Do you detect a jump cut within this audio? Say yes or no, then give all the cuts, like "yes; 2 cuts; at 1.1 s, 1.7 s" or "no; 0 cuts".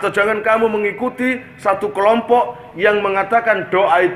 no; 0 cuts